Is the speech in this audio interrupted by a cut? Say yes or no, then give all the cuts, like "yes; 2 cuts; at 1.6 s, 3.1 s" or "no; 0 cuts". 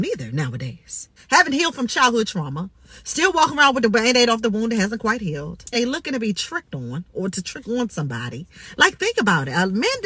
yes; 2 cuts; at 1.1 s, 5.8 s